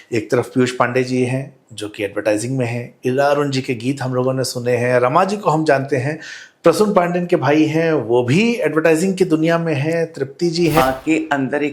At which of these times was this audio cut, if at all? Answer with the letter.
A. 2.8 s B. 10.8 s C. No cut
B